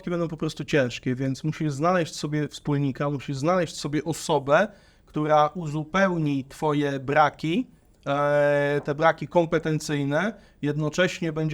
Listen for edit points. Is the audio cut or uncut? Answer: uncut